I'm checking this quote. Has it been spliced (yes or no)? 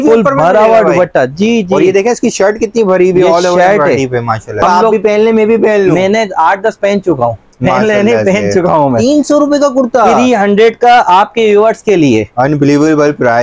yes